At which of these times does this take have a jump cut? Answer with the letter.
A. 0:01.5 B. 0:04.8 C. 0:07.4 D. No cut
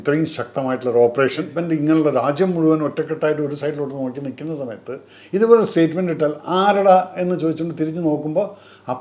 A